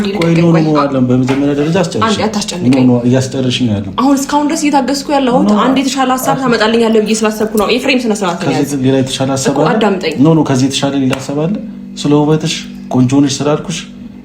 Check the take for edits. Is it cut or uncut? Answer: uncut